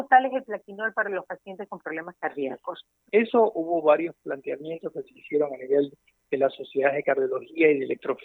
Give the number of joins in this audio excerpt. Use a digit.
1